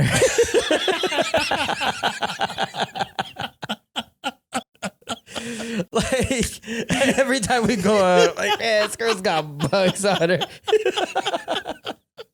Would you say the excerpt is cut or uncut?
uncut